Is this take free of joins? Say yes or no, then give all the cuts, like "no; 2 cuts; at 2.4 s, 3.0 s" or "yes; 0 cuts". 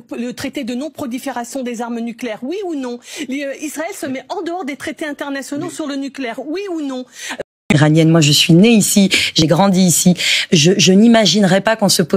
no; 1 cut; at 7.4 s